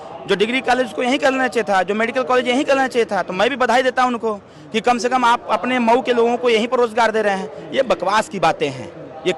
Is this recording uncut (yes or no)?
yes